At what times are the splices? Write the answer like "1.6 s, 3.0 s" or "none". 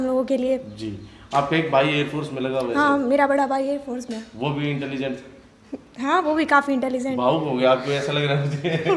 none